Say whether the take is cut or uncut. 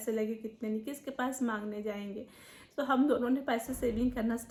uncut